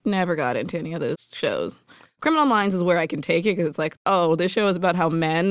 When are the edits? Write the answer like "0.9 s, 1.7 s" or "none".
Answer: 1.3 s, 2.1 s, 3.9 s

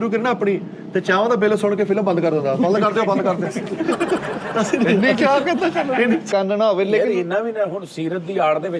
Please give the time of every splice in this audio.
6.3 s

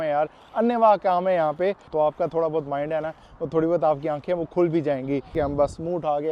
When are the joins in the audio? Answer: 1.9 s, 5.3 s

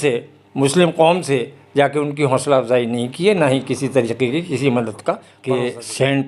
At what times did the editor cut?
5.3 s

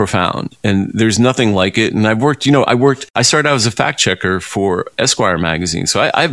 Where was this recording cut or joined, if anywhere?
3.1 s

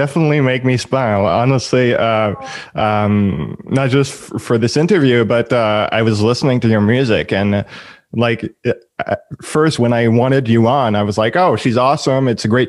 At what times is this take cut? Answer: none

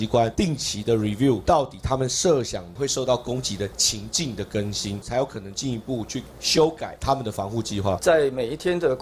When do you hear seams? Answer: 2.6 s, 5.1 s, 6.9 s, 8.0 s

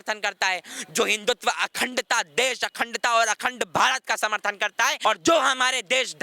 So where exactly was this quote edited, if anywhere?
5.0 s

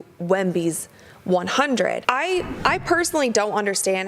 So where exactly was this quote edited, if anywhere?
2.5 s

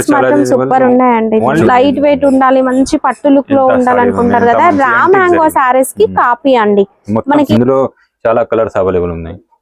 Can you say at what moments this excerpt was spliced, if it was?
1.6 s, 7.5 s

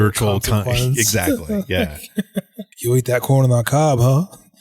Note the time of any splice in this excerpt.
2.6 s

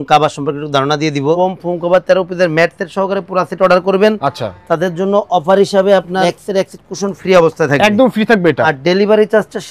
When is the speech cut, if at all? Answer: 1.4 s, 6.2 s, 8.6 s

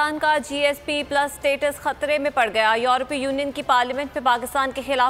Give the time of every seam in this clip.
none

